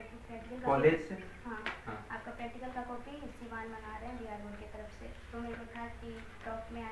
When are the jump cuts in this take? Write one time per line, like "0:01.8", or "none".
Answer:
none